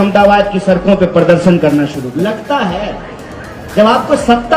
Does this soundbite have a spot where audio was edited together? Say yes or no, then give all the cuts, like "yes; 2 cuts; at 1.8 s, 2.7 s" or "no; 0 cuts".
yes; 1 cut; at 2.1 s